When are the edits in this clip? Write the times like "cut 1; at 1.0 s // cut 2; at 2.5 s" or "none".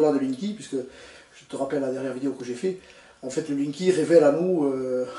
cut 1; at 2.0 s